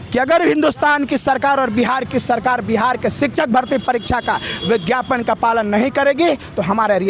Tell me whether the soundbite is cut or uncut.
uncut